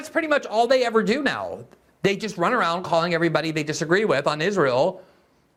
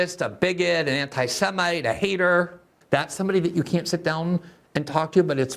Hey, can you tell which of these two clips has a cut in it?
second; 1 cut; at 2.7 s

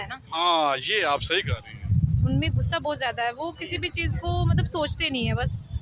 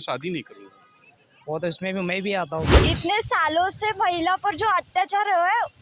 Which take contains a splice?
second; 1 cut; at 2.8 s

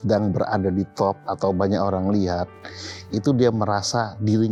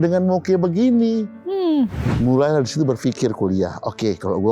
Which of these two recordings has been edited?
second; 1 cut; at 2.0 s

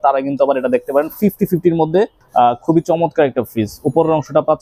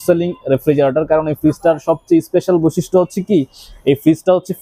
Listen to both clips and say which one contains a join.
first; 1 cut; at 2.2 s

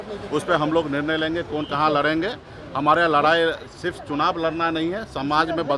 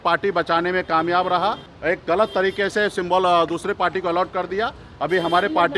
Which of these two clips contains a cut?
second; 1 cut; at 1.7 s

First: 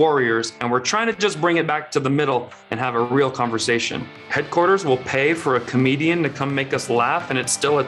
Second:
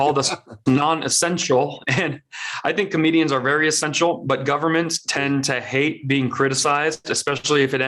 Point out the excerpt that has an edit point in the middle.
first; 1 cut; at 4.1 s

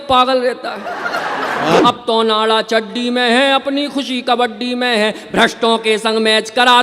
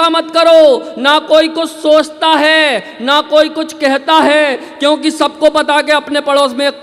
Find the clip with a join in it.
first; 1 cut; at 1.8 s

